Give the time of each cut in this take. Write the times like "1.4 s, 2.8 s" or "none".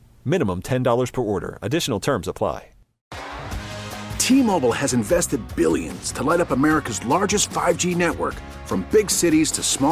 2.9 s